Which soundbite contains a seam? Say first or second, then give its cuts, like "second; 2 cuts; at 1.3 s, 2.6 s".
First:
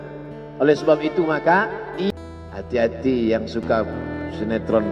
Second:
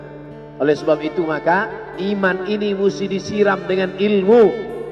first; 1 cut; at 2.1 s